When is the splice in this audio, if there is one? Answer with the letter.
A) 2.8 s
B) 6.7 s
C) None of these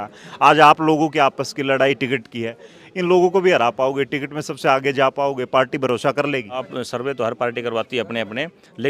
B